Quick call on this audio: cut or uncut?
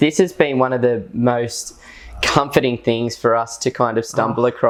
uncut